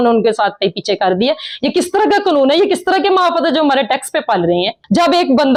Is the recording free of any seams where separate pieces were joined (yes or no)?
yes